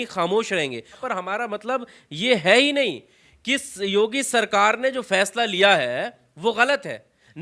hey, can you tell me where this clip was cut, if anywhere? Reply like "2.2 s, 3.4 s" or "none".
1.0 s